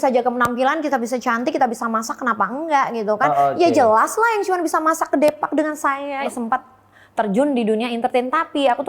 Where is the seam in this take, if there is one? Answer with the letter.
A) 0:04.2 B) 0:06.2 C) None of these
B